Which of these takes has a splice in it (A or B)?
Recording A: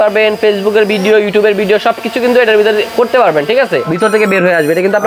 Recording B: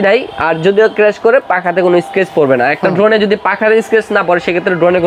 A